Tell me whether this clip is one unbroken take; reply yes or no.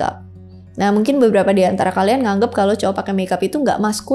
yes